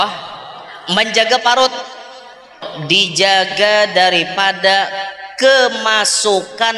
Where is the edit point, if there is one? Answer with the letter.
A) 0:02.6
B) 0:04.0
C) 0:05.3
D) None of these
A